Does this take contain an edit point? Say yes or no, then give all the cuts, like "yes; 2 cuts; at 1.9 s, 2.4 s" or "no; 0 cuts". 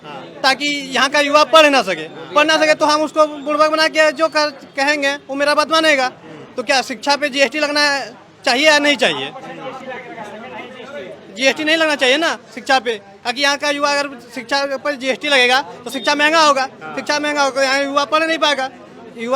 no; 0 cuts